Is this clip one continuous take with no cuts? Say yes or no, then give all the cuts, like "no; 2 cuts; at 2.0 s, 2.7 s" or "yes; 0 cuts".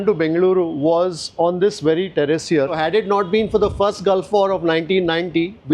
no; 1 cut; at 2.8 s